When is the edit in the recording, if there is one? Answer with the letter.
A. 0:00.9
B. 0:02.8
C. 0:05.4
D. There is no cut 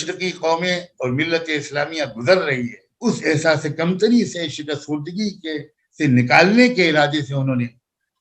B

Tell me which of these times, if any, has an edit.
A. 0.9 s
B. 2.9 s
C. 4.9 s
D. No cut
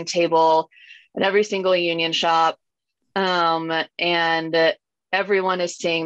D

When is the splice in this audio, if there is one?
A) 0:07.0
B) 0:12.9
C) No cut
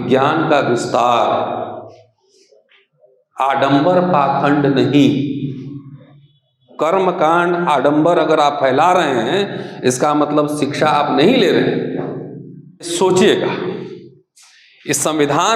B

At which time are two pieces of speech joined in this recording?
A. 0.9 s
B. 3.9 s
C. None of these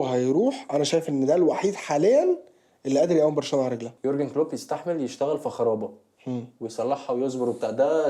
B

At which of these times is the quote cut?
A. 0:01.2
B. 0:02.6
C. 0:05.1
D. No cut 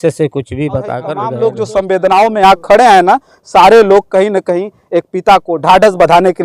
A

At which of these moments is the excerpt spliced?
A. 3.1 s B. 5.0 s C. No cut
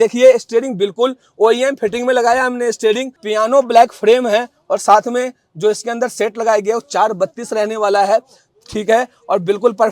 A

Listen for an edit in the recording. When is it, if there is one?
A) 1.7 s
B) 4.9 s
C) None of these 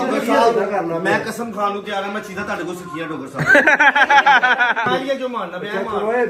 B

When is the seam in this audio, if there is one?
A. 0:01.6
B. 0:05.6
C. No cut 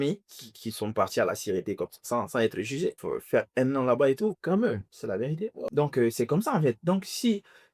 B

